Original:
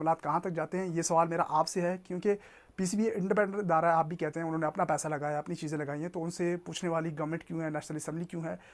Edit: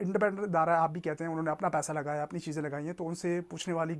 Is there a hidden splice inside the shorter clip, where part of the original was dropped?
no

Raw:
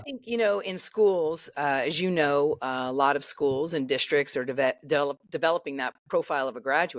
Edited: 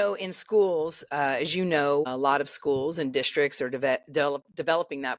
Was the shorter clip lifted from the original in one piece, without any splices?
no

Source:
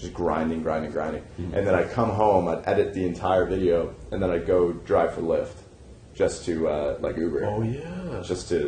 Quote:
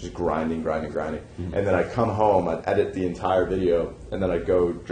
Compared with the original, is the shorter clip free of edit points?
yes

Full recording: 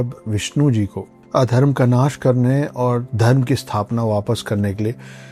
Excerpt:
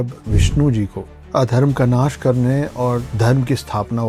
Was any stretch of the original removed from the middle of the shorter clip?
no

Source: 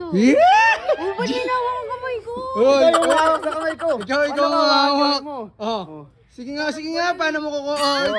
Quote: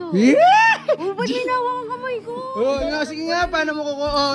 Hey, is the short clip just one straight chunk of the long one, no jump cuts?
no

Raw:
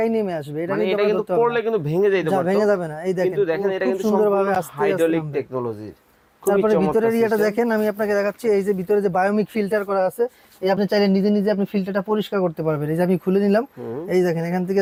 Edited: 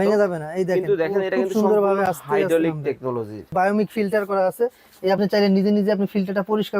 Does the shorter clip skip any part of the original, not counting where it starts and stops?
yes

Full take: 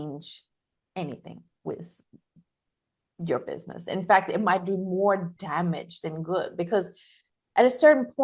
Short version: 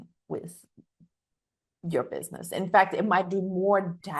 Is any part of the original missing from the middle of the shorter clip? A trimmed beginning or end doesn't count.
no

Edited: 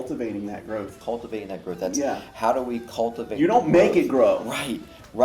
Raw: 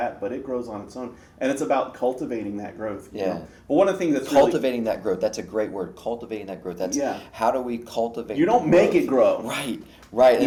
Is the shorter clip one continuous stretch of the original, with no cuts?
no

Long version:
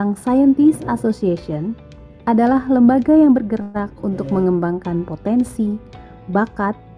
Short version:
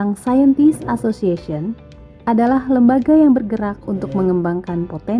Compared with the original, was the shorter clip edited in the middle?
yes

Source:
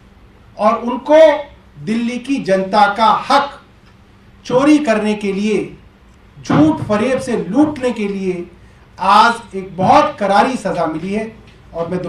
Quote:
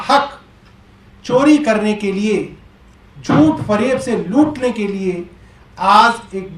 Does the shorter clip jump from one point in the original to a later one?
no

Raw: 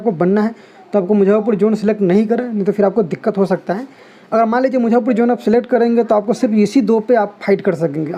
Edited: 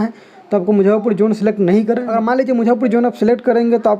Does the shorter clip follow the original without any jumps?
no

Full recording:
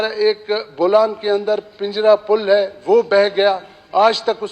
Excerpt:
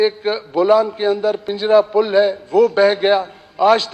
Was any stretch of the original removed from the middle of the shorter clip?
yes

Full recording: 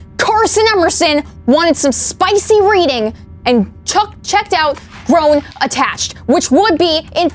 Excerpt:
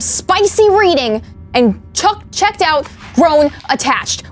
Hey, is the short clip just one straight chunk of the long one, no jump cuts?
yes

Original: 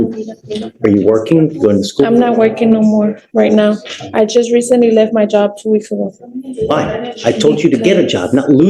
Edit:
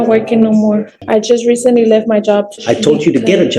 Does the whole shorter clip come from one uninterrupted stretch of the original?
no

